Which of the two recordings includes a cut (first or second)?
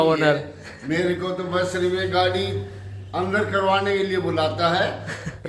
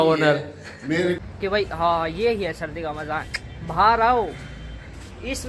second